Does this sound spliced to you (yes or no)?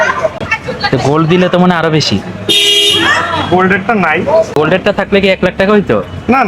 yes